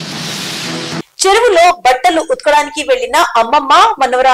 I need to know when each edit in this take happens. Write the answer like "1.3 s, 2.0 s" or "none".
1.0 s